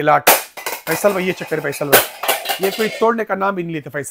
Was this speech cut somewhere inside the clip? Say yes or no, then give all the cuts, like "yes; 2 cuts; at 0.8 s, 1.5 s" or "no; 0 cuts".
no; 0 cuts